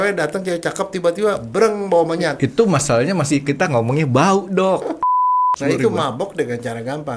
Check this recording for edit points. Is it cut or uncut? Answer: cut